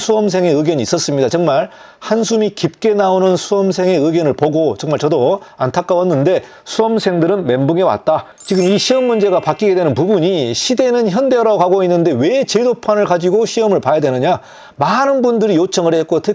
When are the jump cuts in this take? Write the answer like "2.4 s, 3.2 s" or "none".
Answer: 5.5 s, 8.3 s